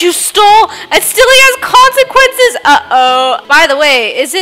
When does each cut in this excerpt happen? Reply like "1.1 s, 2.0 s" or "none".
3.4 s